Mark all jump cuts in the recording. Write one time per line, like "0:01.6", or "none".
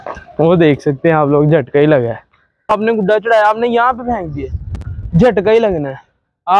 0:02.7